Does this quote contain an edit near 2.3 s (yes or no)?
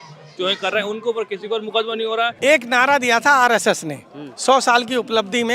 yes